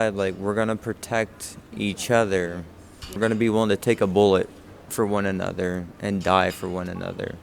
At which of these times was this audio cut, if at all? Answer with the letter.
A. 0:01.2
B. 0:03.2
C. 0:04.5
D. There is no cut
B